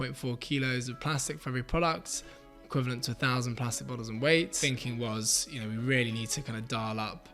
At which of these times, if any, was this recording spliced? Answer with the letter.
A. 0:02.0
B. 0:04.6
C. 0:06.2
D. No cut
B